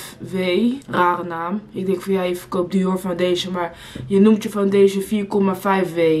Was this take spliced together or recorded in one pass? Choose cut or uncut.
uncut